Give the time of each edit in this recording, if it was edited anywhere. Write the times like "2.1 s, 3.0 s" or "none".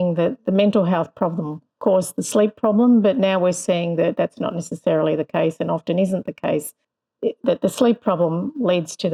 none